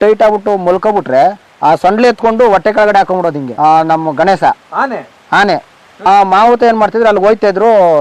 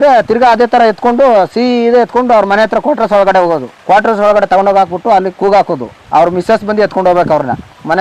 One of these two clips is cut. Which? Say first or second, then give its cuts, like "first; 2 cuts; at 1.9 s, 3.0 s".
first; 3 cuts; at 1.5 s, 3.5 s, 5.9 s